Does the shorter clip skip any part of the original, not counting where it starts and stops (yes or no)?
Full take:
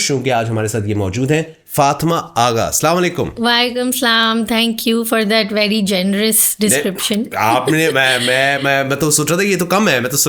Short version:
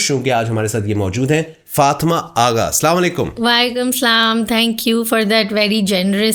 no